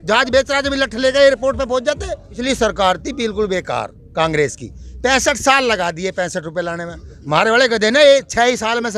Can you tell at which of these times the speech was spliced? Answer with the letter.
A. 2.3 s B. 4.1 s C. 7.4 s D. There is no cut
A